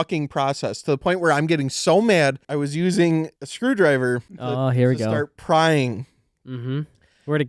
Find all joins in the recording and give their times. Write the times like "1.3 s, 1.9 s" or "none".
2.4 s, 3.4 s, 4.3 s